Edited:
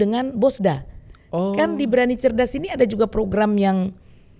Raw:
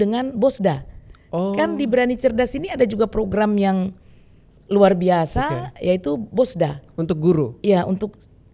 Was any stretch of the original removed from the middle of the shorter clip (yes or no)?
no